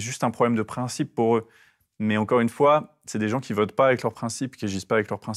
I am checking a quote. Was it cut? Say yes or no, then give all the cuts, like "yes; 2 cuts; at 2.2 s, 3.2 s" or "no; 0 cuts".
no; 0 cuts